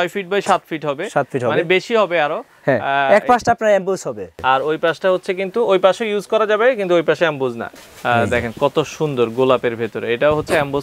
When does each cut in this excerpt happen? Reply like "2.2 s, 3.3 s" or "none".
4.4 s, 7.7 s